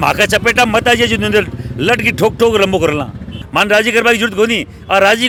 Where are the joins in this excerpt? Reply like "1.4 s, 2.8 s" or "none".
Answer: none